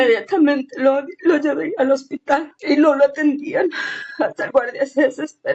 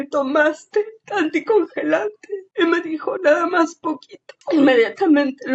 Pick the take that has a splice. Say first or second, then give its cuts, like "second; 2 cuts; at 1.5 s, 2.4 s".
first; 1 cut; at 2.5 s